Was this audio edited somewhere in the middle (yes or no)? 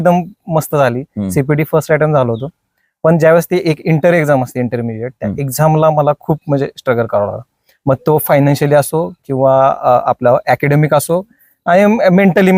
no